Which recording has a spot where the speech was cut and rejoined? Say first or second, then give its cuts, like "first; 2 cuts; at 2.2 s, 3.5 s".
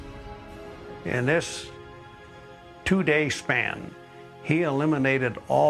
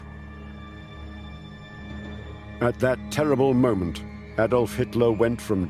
second; 1 cut; at 2.3 s